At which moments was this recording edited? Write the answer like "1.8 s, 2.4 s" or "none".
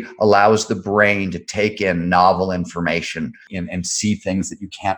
3.5 s